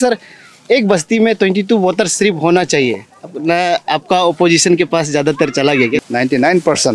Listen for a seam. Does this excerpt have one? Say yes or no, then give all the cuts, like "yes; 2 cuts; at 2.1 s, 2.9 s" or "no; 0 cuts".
yes; 1 cut; at 6.0 s